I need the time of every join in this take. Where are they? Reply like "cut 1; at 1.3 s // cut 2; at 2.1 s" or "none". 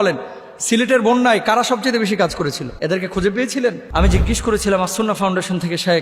cut 1; at 2.7 s // cut 2; at 3.8 s